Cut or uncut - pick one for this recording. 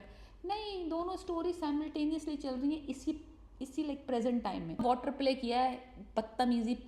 cut